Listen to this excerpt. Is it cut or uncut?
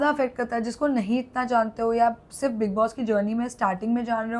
uncut